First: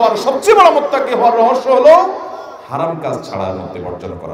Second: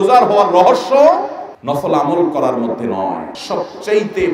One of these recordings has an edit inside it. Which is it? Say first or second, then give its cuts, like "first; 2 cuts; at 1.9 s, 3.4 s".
second; 1 cut; at 3.3 s